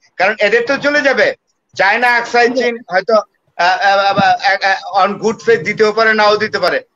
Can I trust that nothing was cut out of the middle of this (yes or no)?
yes